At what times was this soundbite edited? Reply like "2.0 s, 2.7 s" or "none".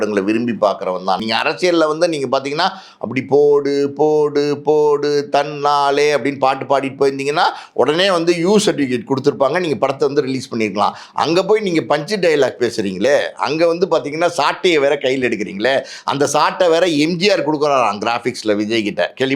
1.2 s